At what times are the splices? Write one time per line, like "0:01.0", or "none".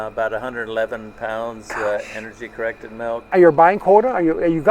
0:03.3